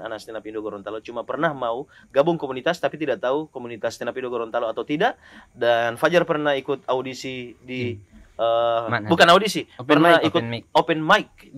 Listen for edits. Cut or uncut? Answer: uncut